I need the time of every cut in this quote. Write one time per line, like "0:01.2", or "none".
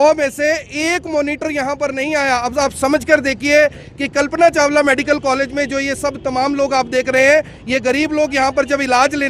none